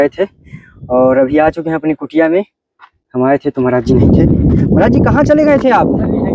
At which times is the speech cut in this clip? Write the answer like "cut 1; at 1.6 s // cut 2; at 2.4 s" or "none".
none